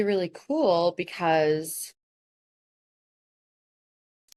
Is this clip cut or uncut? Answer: uncut